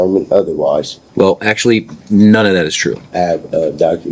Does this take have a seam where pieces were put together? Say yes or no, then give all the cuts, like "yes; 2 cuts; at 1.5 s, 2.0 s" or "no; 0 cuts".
yes; 2 cuts; at 1.0 s, 3.0 s